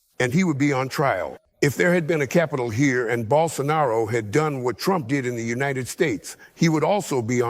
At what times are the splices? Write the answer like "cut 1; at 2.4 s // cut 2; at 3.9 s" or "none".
cut 1; at 1.4 s